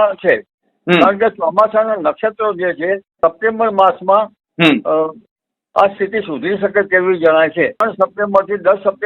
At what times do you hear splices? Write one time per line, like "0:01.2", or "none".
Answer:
0:03.1
0:07.8